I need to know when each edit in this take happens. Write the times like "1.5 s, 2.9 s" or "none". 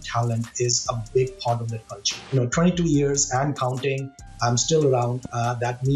2.3 s